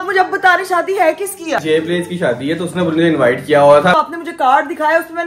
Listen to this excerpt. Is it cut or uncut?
cut